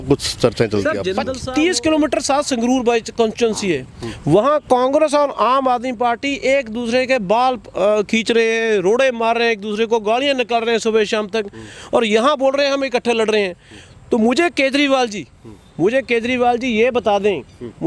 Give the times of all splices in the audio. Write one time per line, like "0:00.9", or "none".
0:01.3